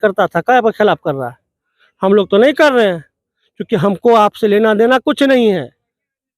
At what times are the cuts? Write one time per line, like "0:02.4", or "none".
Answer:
none